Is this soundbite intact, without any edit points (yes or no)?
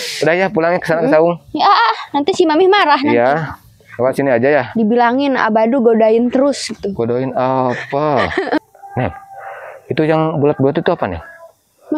no